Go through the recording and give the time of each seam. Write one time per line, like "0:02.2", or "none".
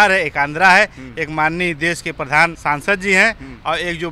0:02.6